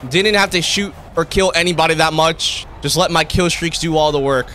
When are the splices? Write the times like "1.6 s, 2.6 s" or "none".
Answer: none